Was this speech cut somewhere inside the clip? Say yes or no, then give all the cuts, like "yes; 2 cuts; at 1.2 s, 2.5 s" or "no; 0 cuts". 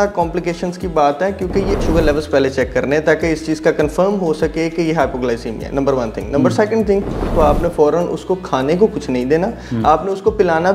yes; 2 cuts; at 1.8 s, 7.3 s